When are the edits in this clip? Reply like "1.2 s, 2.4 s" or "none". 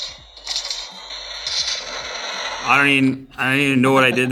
none